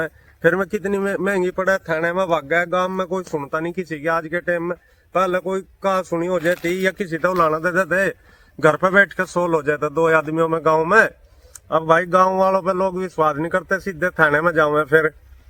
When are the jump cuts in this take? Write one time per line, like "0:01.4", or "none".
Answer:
none